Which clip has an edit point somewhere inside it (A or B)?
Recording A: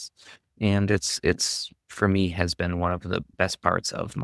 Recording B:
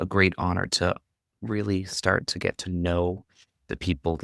A